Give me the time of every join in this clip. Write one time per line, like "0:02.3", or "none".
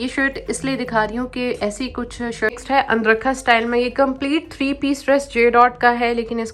0:02.6

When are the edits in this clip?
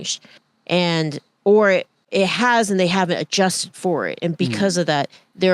0:02.0

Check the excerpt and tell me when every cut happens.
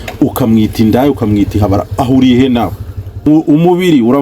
0:03.3

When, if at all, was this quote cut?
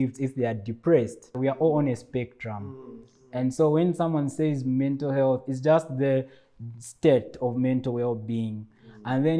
0:01.4

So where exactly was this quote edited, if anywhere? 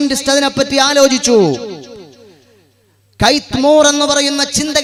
none

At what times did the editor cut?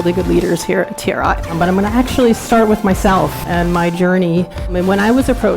0:01.5
0:03.4
0:04.7

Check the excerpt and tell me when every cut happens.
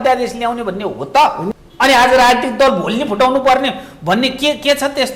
0:01.4

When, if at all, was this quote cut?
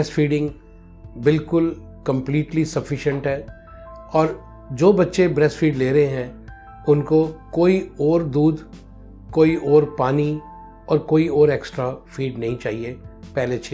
none

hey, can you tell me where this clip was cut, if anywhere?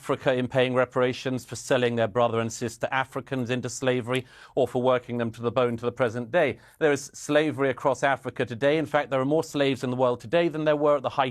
none

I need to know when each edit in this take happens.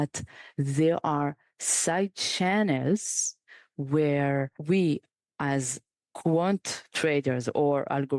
0:04.5

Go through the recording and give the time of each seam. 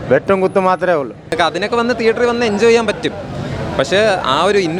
0:01.3

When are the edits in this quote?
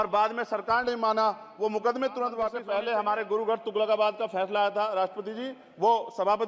0:02.6

